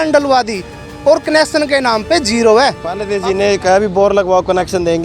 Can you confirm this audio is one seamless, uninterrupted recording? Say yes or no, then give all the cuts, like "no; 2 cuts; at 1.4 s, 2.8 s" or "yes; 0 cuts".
no; 1 cut; at 3.1 s